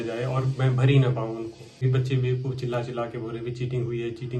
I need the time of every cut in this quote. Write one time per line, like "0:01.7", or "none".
0:01.8